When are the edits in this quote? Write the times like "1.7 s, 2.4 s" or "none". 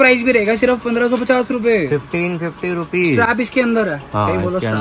none